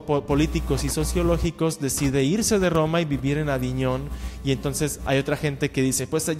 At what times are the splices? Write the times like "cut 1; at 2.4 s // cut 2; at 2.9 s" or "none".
none